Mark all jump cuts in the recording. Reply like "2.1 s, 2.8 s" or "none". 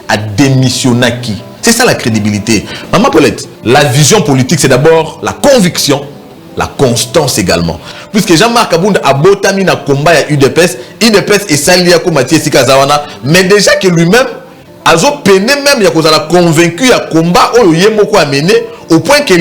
3.5 s, 7.9 s